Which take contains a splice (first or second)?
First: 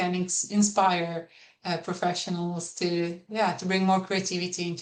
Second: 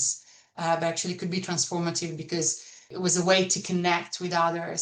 second